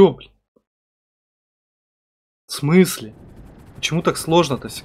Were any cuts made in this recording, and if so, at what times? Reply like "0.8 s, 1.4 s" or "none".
none